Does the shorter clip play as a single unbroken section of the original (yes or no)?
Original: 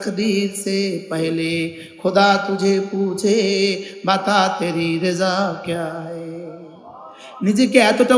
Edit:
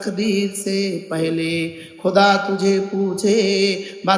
yes